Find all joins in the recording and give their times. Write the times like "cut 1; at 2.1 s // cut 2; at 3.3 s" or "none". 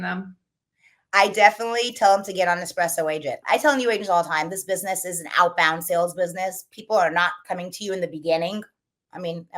cut 1; at 3.4 s

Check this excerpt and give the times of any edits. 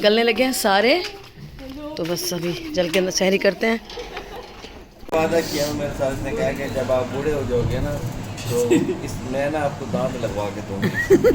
cut 1; at 5.1 s

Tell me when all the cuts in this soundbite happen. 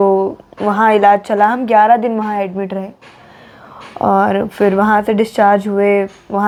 none

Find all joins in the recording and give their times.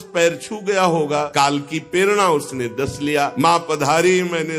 cut 1; at 1.3 s // cut 2; at 3.3 s

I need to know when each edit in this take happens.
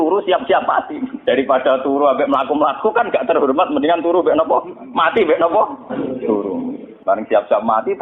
cut 1; at 1.1 s // cut 2; at 6.9 s

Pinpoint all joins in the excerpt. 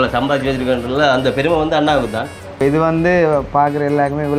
cut 1; at 2.5 s

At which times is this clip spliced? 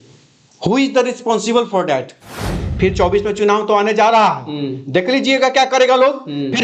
cut 1; at 2.6 s

